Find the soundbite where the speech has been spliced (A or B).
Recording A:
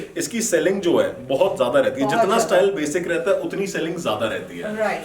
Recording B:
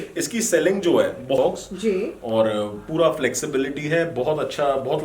B